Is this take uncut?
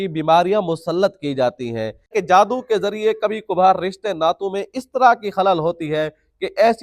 no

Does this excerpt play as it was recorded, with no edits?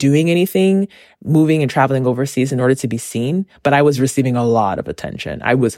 yes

